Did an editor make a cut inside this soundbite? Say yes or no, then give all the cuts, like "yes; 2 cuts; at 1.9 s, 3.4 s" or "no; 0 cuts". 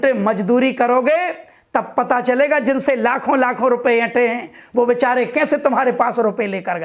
no; 0 cuts